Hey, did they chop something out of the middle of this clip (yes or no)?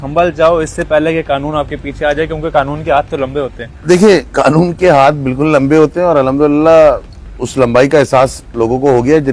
no